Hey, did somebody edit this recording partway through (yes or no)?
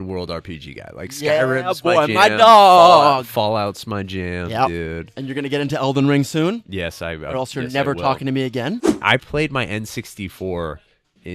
yes